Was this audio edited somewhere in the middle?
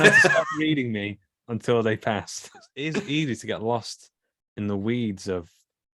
yes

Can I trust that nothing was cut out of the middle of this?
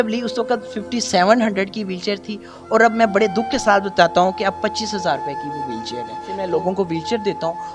no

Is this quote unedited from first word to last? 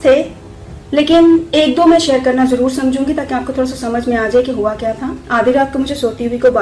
no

